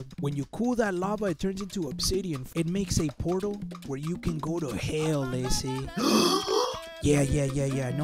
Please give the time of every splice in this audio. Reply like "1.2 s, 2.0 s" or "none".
2.5 s, 5.9 s